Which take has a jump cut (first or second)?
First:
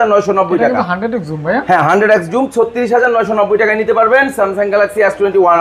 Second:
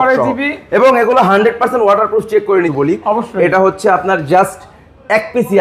second